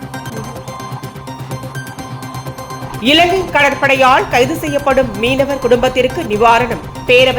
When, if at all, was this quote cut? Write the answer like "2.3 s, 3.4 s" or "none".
2.8 s